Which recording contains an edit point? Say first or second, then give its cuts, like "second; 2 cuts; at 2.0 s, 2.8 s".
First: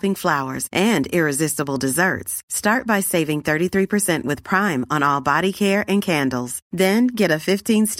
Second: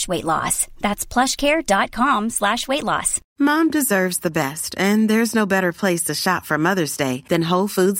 second; 1 cut; at 3.2 s